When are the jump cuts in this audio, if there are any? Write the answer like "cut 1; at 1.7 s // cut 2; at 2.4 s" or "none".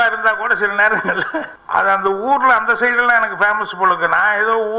cut 1; at 1.6 s